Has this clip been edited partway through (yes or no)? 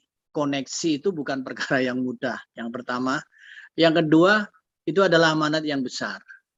no